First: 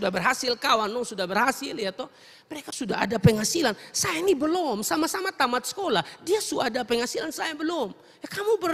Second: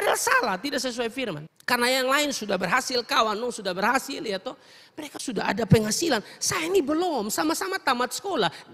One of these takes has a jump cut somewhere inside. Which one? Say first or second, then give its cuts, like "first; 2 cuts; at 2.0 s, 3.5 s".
second; 1 cut; at 1.5 s